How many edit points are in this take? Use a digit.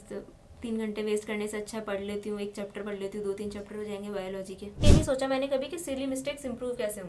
1